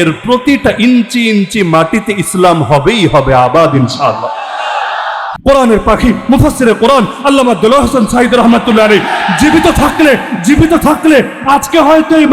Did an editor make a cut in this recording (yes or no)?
yes